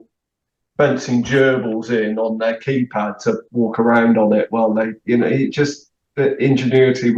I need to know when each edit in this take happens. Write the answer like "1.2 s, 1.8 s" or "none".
none